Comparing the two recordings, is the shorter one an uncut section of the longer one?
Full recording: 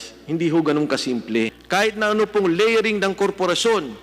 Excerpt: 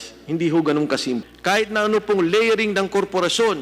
no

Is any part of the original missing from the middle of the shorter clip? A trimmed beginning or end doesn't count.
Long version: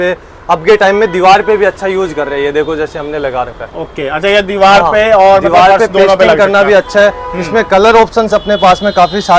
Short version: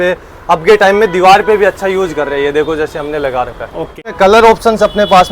yes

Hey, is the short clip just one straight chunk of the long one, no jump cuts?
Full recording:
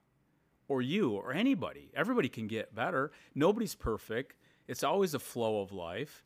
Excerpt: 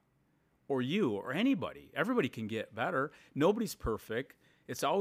yes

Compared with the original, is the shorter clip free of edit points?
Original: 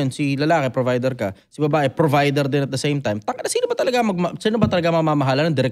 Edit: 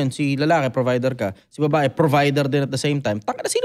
yes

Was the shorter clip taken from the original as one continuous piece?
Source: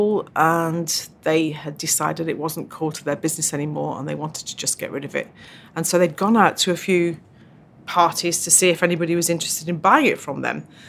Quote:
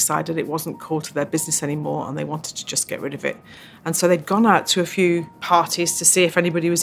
no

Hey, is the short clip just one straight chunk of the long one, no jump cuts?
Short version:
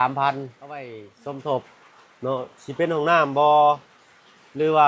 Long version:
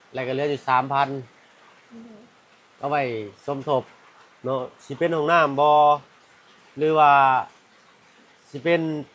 no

